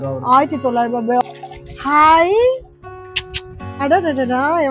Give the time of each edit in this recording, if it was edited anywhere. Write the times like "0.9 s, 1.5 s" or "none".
1.2 s